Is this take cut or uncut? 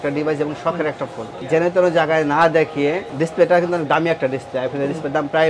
cut